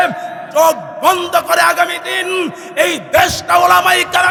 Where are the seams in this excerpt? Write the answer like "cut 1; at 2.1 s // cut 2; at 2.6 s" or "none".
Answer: none